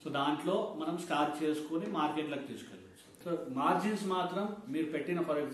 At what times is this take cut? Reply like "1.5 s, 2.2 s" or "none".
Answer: 3.2 s